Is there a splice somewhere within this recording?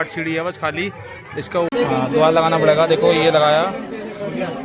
yes; 1 cut; at 1.7 s

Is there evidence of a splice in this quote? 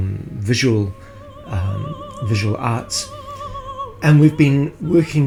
no; 0 cuts

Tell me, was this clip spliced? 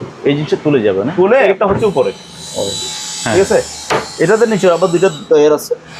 yes; 1 cut; at 1.5 s

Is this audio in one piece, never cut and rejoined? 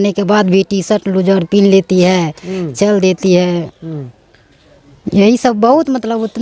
yes; 0 cuts

